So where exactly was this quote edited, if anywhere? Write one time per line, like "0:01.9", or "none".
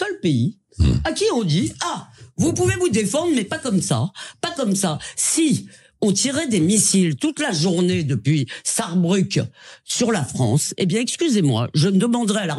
none